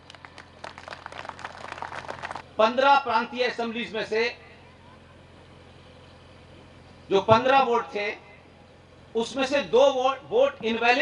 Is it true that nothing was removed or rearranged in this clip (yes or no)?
no